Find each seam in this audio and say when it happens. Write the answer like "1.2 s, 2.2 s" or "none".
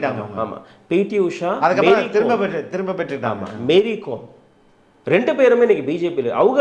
none